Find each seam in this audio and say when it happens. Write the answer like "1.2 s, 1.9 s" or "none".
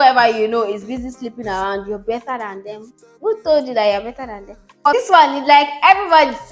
4.8 s